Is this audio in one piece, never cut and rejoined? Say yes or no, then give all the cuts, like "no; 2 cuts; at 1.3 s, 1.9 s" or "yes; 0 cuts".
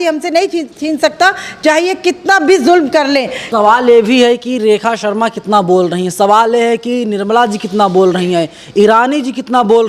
no; 1 cut; at 3.4 s